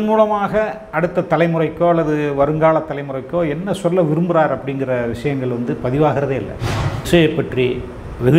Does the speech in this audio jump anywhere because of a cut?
yes; 1 cut; at 7.1 s

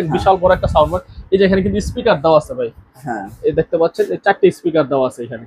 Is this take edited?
no; 0 cuts

